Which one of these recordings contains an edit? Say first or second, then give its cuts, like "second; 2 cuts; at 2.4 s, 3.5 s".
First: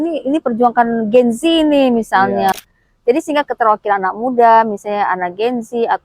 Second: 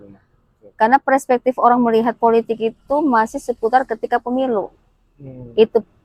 first; 1 cut; at 2.5 s